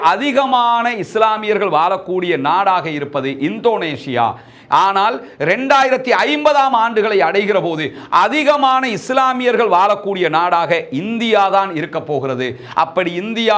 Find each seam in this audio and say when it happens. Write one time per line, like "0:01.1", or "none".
none